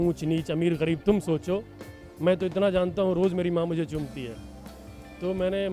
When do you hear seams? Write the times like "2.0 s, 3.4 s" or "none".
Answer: none